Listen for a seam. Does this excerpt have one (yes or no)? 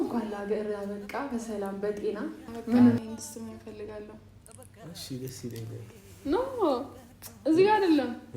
yes